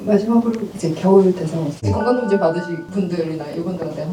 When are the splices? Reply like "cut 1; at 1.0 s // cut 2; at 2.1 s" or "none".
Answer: none